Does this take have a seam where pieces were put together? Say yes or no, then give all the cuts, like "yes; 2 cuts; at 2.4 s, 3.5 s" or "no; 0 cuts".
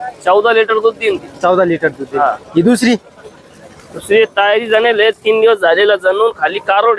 no; 0 cuts